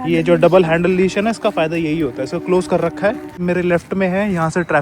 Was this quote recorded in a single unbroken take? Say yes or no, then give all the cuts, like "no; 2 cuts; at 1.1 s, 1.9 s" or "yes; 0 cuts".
no; 1 cut; at 3.4 s